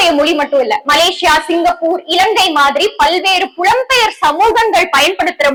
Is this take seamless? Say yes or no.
yes